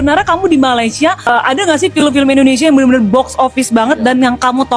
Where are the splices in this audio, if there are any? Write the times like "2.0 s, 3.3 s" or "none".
1.3 s